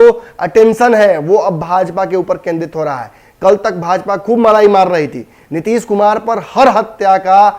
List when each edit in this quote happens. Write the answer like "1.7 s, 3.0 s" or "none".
none